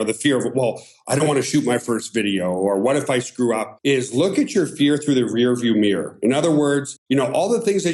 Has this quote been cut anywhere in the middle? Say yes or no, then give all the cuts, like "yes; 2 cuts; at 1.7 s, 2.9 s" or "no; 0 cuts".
no; 0 cuts